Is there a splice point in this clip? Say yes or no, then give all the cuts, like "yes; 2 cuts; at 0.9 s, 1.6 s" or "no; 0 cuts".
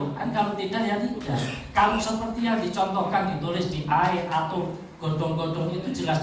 no; 0 cuts